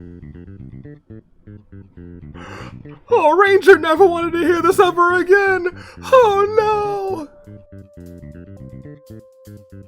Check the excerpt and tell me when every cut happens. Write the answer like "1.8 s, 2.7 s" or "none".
8.7 s